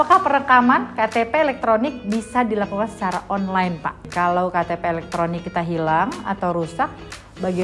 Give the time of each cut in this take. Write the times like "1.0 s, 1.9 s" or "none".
4.0 s